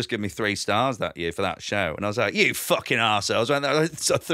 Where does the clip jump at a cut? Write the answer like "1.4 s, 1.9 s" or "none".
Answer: none